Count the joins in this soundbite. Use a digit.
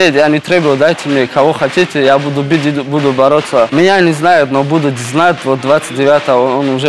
1